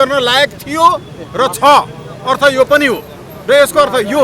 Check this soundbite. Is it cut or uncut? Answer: uncut